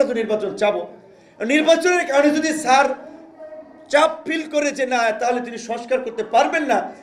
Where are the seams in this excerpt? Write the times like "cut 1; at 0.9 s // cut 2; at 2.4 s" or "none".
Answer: none